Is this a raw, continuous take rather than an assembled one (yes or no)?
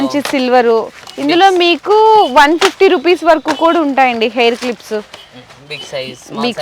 yes